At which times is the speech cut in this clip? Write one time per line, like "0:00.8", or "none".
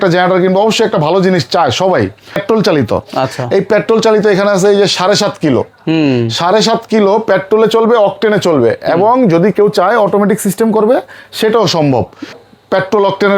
0:02.4
0:12.4